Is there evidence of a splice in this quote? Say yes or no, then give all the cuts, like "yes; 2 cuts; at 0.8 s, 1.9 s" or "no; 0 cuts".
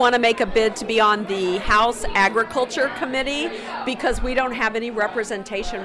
no; 0 cuts